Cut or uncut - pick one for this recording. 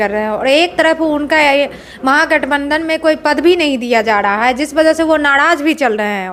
uncut